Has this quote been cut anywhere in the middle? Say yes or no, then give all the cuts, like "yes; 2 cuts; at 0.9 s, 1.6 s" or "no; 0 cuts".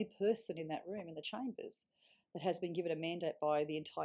no; 0 cuts